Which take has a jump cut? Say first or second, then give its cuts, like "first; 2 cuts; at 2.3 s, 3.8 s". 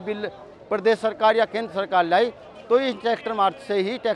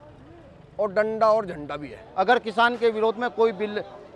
second; 1 cut; at 2.0 s